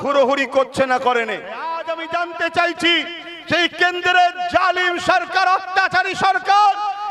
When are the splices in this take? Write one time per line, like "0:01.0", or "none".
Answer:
0:01.9

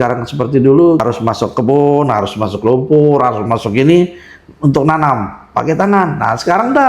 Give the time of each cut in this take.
0:01.0

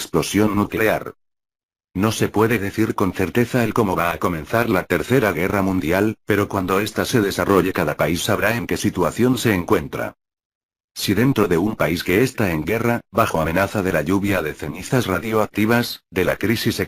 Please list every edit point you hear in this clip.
0:11.0

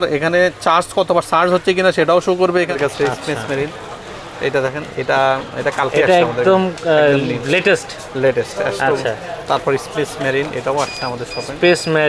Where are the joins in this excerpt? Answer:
0:02.7

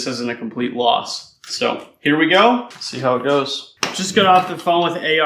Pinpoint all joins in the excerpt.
0:03.6

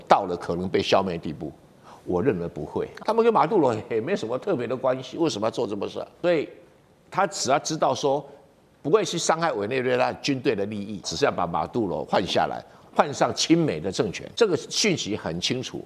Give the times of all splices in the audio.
0:02.9
0:06.1
0:11.1
0:14.2

